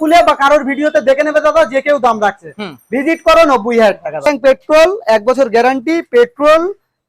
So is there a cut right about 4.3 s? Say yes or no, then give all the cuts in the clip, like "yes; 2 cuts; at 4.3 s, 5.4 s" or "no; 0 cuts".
yes; 1 cut; at 4.3 s